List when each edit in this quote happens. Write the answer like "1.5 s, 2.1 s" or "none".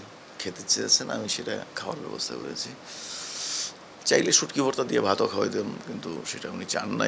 none

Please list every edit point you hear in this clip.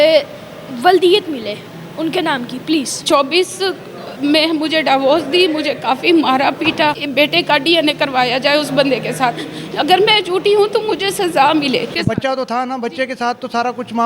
3.0 s, 7.0 s, 11.9 s

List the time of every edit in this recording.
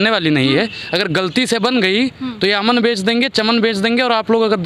none

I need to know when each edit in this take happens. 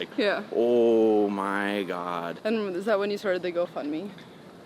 2.3 s

